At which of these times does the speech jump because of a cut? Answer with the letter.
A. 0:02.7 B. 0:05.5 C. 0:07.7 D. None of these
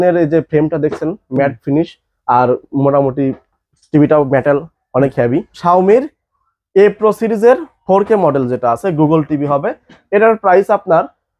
B